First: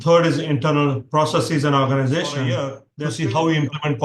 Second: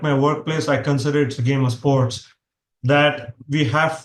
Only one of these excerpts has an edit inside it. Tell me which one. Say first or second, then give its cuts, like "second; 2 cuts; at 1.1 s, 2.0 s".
first; 1 cut; at 2.9 s